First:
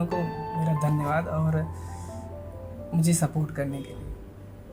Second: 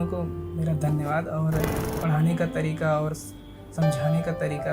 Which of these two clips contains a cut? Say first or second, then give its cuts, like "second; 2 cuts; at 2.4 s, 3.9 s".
second; 1 cut; at 1.9 s